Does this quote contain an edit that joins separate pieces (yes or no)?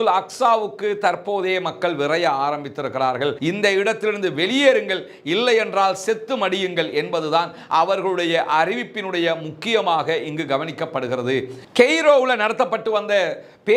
yes